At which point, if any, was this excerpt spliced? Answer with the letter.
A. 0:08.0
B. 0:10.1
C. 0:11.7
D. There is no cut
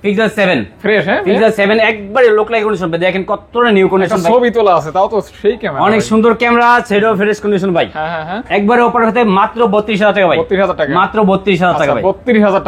D